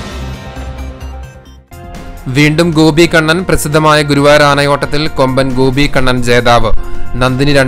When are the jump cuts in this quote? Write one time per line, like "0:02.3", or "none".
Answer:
0:01.5